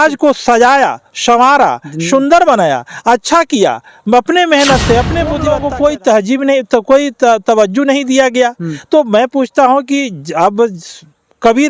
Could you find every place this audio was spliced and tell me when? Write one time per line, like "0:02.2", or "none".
0:05.4